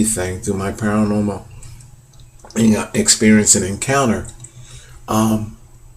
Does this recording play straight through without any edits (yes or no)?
no